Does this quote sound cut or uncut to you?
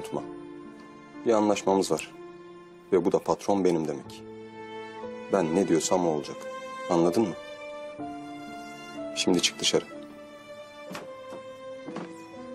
cut